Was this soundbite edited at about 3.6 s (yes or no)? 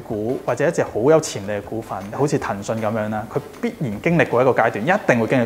no